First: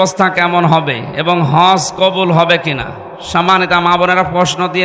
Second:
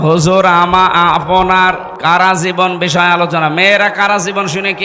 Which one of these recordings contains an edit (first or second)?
second